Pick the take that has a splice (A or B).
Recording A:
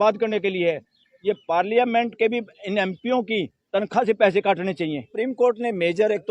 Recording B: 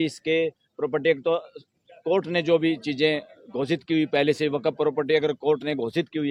A